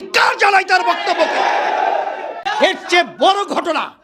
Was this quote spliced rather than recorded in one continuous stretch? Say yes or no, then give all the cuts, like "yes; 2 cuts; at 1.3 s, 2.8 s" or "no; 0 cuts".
yes; 1 cut; at 2.4 s